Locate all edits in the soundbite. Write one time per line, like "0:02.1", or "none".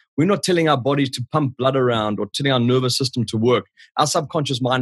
0:02.3